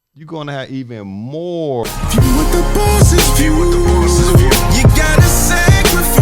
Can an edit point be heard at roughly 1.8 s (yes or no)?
yes